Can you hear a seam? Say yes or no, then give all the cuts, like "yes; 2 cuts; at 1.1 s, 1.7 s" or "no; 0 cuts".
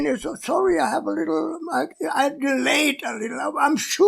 yes; 1 cut; at 1.9 s